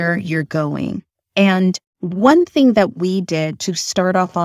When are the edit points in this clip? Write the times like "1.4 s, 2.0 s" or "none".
1.3 s

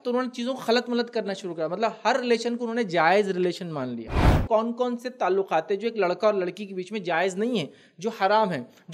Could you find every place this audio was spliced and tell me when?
4.4 s

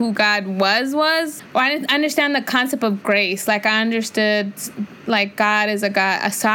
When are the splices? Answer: none

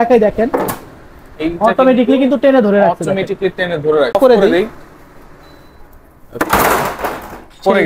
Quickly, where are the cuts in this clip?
4.1 s

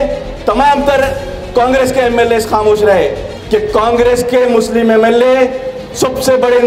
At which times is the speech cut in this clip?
3.2 s

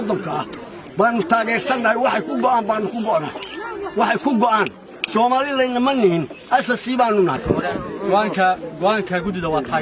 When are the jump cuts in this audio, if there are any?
7.4 s

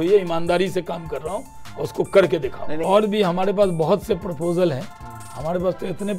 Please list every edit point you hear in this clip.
2.8 s

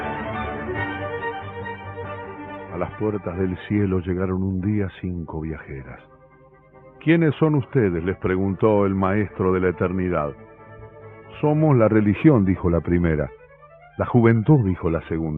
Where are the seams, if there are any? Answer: none

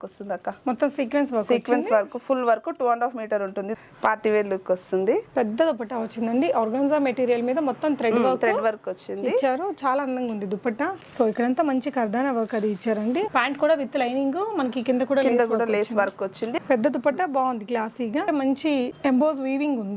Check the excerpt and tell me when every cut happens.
3.8 s, 11.0 s, 13.3 s, 18.3 s

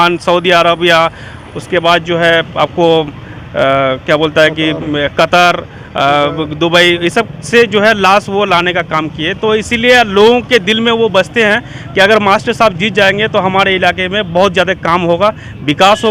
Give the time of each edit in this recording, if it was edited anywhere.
none

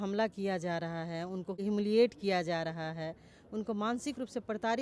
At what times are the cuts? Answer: 1.6 s

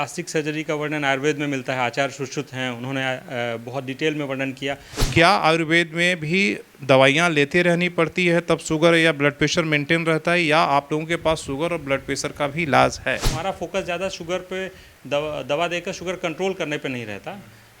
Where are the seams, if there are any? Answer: 5.1 s, 13.3 s

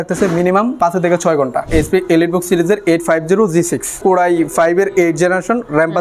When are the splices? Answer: 0.7 s, 1.7 s, 4.0 s

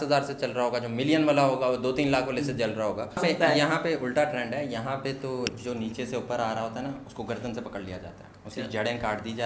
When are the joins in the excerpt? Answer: 3.2 s

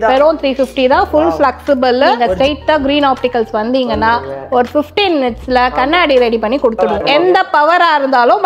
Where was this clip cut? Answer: 2.2 s, 6.9 s

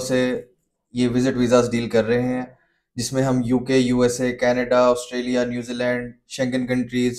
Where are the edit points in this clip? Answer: none

